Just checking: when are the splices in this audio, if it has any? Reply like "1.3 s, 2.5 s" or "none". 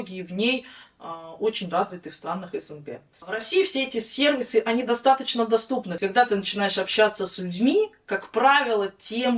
3.3 s, 5.9 s